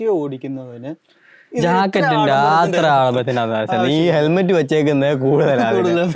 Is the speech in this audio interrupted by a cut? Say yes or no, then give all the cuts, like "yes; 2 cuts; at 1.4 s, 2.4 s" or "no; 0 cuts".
no; 0 cuts